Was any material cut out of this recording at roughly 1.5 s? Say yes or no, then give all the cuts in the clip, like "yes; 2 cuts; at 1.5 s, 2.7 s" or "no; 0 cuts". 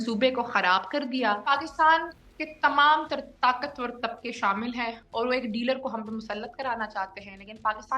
yes; 1 cut; at 1.5 s